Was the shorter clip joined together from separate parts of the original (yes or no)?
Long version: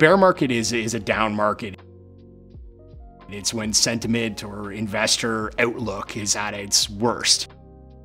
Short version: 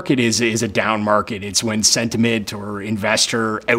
yes